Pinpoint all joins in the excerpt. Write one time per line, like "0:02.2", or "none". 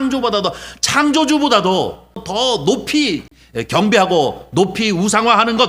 0:02.2
0:03.4